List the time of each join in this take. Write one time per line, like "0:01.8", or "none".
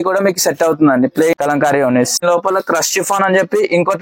0:01.3
0:02.2